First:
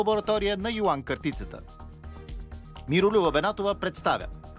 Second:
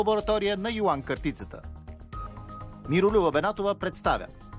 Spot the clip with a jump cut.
second; 2 cuts; at 1.6 s, 2.9 s

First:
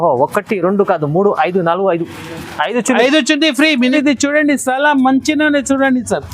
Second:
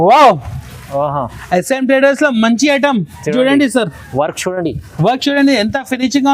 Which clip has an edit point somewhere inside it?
first; 1 cut; at 3.9 s

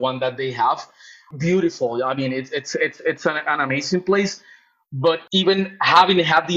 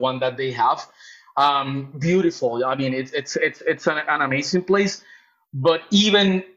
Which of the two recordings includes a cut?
first; 2 cuts; at 1.2 s, 5.2 s

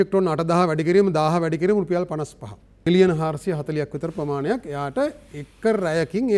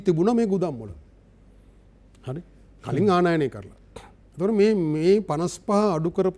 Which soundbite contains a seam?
first; 1 cut; at 2.8 s

